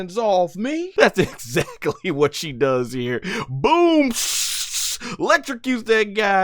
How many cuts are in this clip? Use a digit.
1